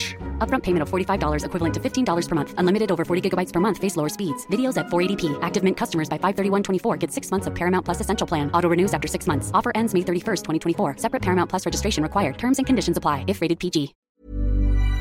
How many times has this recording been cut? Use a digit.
1